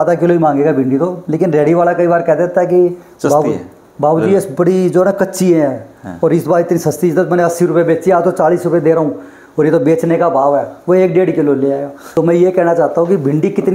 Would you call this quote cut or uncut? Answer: cut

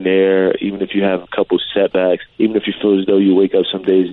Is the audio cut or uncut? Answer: cut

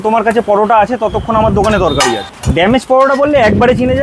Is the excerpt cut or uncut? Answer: cut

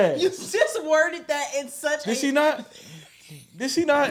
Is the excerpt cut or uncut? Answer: uncut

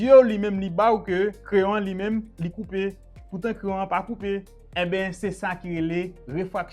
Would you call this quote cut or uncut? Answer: cut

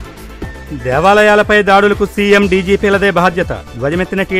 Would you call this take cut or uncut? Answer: uncut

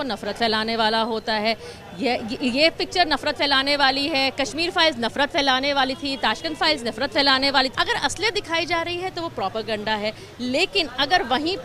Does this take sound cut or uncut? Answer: cut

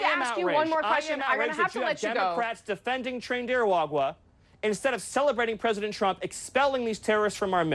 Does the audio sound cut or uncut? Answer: uncut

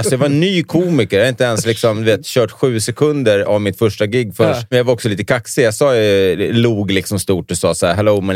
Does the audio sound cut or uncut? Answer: cut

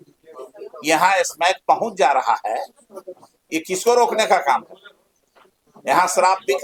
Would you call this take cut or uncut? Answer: uncut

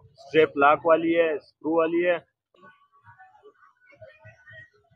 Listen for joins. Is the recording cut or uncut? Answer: cut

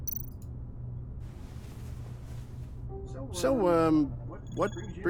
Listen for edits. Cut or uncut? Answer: cut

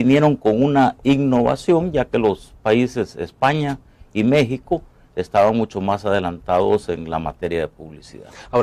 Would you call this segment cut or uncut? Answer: uncut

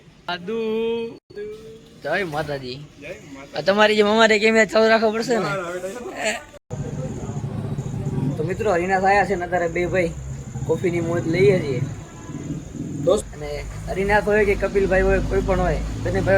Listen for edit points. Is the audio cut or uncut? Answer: cut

